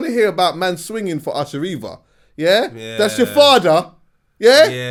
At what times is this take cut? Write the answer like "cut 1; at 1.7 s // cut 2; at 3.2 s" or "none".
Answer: none